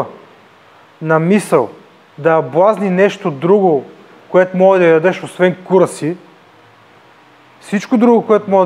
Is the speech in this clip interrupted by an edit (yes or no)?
no